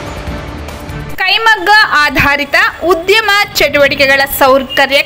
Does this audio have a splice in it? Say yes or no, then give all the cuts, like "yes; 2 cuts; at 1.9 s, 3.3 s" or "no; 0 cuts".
no; 0 cuts